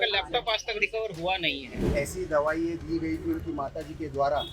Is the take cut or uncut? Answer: cut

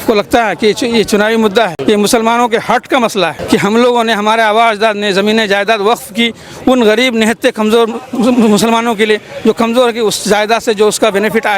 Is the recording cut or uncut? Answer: cut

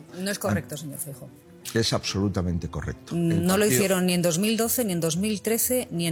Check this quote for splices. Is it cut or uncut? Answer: uncut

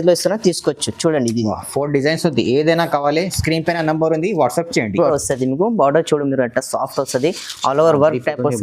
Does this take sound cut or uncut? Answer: cut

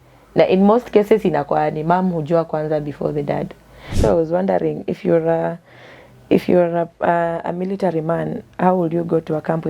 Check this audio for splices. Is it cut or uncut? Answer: cut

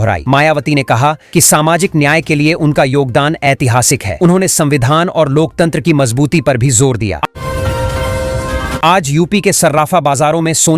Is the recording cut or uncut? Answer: cut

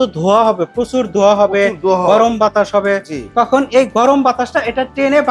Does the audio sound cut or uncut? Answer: uncut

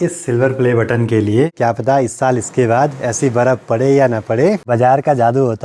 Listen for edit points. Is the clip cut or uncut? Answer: cut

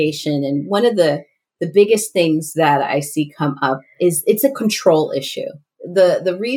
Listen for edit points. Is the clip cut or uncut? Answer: uncut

